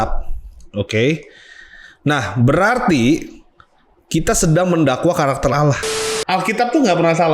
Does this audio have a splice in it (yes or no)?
yes